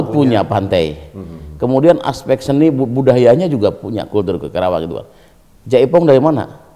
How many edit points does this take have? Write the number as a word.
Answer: zero